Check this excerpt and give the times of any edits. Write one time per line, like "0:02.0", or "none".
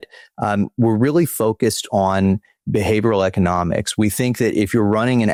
none